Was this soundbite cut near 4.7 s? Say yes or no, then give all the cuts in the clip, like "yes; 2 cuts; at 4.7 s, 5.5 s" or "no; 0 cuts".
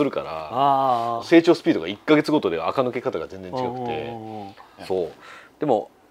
yes; 1 cut; at 4.7 s